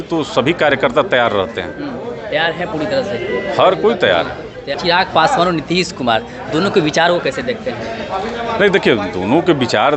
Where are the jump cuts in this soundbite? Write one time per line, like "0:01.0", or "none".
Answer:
0:04.8